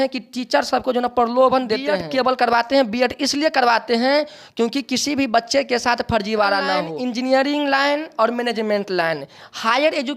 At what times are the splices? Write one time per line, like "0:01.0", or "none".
0:01.9
0:06.7

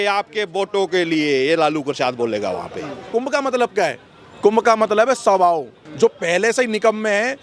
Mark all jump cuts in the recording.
0:03.1
0:05.8

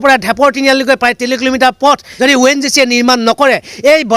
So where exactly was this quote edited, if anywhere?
0:02.1

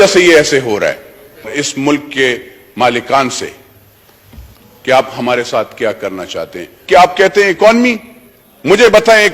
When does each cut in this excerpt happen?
0:01.5
0:06.8

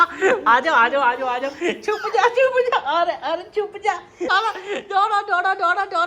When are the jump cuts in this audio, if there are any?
0:04.3

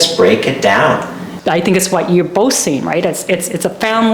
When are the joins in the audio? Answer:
0:01.3

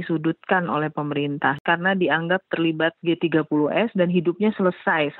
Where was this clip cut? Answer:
0:01.6

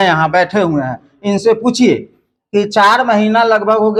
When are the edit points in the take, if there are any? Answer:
none

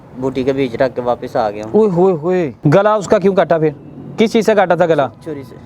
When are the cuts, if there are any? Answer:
0:02.5

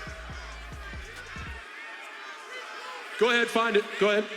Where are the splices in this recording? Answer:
none

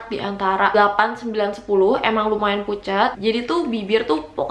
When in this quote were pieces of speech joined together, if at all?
0:03.1

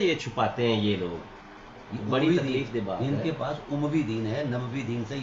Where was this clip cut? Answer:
none

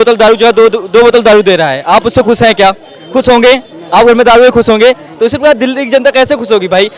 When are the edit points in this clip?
none

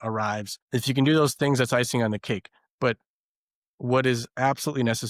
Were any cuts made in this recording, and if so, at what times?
none

